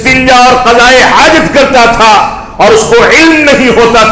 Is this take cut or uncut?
uncut